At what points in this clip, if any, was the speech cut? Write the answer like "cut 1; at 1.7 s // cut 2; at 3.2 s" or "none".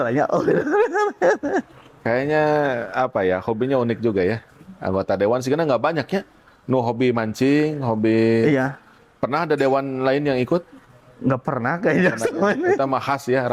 none